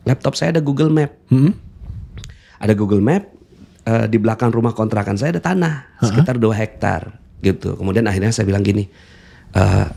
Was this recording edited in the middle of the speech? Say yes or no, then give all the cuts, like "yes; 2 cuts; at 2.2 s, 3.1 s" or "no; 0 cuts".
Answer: no; 0 cuts